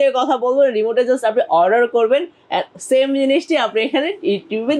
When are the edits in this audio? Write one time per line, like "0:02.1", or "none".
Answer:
none